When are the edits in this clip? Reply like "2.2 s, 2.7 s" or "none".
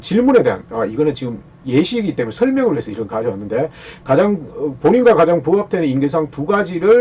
none